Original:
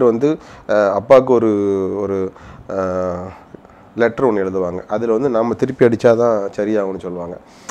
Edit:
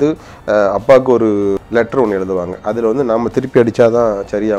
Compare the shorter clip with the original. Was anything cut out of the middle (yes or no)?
yes